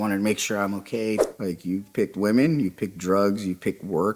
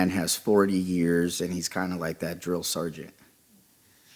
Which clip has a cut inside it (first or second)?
first